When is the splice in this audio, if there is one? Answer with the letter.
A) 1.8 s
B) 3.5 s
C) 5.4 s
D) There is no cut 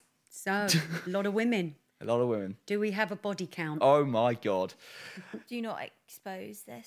C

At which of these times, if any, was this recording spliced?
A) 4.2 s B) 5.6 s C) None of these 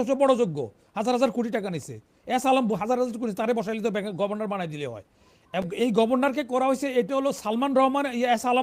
B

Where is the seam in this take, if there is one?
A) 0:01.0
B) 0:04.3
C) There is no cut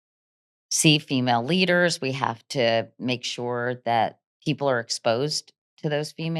B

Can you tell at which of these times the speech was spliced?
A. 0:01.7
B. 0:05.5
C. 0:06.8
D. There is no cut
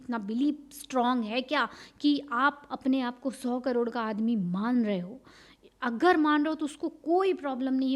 D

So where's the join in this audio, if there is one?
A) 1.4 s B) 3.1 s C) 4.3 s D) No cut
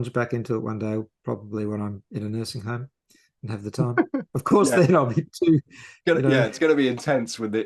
C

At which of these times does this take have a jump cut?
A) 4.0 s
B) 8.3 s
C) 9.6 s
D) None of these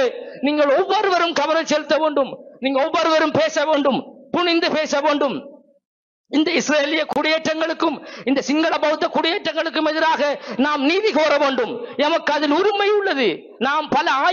D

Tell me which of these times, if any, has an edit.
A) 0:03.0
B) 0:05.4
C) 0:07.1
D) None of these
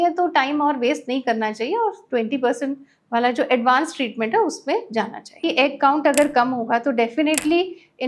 B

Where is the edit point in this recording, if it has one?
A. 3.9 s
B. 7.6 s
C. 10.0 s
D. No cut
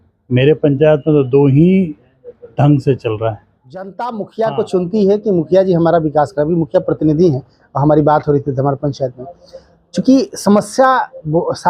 A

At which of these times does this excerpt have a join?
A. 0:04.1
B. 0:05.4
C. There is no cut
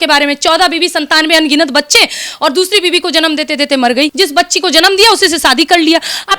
A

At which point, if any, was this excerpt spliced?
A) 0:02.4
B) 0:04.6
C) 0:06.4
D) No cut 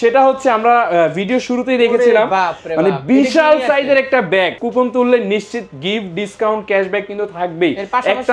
B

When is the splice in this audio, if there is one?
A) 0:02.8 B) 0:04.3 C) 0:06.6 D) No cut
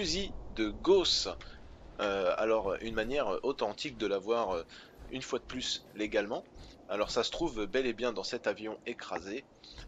B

